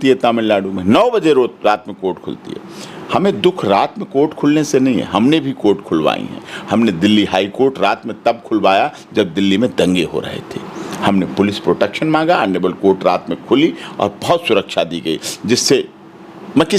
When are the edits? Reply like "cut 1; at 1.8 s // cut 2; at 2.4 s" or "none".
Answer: none